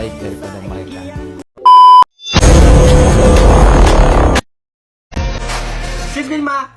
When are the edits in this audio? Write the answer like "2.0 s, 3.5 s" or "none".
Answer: 0.9 s, 2.2 s